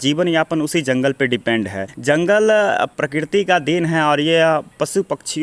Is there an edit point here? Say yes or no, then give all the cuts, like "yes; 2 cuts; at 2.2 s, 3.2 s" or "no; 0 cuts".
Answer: yes; 1 cut; at 1.9 s